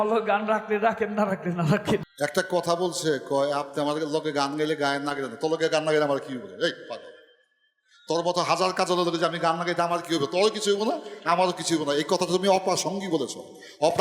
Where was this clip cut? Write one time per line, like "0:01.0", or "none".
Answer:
0:02.1